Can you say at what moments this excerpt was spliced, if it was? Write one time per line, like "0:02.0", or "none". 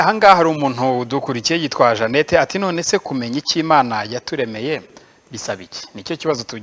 none